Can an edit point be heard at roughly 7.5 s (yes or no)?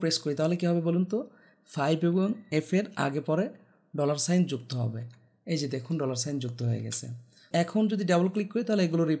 yes